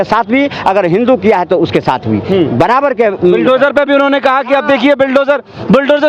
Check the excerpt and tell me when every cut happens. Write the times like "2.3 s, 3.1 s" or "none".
none